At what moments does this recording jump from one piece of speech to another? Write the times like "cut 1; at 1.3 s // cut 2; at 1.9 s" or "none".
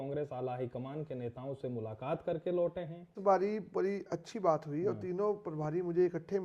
cut 1; at 3.2 s